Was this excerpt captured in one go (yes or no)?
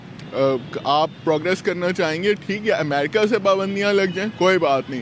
yes